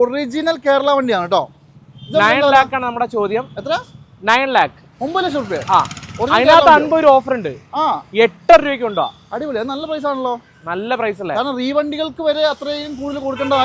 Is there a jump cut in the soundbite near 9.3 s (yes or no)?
no